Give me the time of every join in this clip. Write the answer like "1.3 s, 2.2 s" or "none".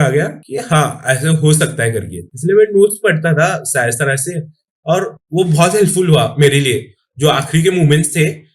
2.2 s